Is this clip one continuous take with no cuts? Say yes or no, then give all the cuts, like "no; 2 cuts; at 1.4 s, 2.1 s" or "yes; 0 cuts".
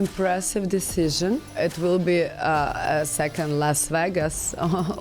no; 1 cut; at 1.5 s